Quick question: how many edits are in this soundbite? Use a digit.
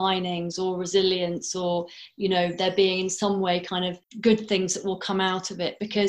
1